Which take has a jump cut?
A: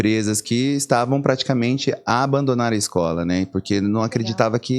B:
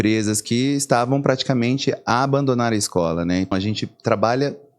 B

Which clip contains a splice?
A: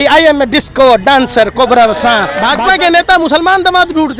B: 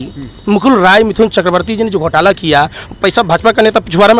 A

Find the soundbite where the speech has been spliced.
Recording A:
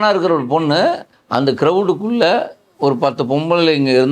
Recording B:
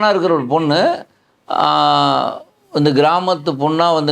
A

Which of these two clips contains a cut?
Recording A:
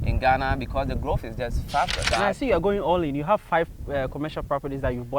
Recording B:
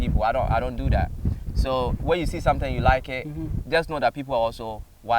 A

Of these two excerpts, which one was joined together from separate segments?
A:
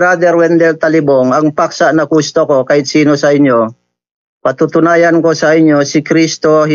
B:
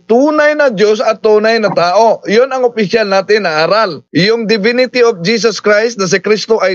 B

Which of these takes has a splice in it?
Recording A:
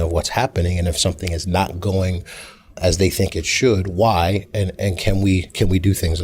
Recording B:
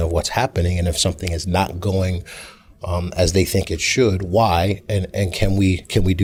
A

